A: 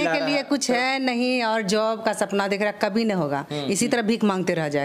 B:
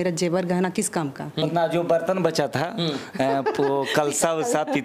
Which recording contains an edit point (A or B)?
B